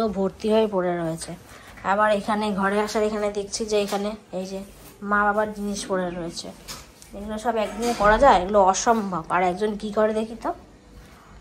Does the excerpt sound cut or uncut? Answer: uncut